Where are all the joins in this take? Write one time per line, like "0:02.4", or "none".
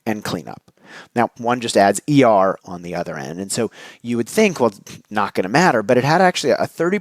0:01.4
0:02.6

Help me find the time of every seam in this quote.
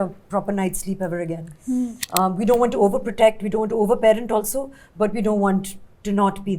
0:01.9

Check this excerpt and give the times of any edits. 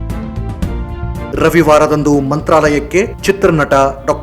0:01.3

